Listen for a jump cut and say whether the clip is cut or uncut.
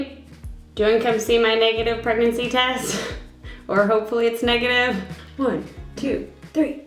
cut